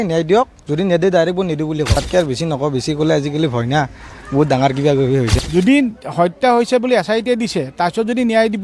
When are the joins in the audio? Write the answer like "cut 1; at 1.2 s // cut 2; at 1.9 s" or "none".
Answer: cut 1; at 2.0 s // cut 2; at 5.3 s